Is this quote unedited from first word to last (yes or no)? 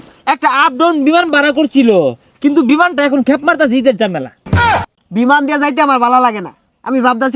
no